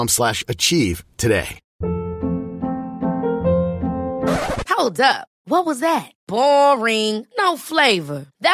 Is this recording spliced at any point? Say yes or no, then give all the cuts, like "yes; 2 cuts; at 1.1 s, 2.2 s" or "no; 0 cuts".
yes; 1 cut; at 1.6 s